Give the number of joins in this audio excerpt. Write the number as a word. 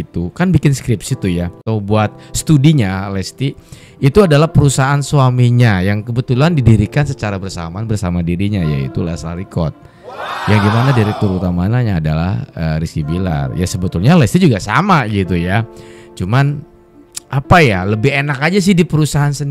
one